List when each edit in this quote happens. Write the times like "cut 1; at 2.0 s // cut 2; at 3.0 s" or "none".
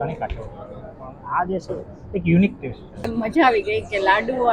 cut 1; at 3.1 s